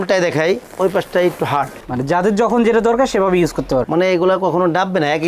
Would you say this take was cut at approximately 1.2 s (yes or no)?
no